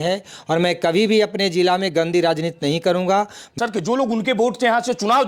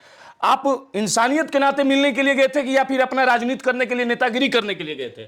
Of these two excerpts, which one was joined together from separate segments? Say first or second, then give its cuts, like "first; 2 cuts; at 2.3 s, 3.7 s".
first; 1 cut; at 3.5 s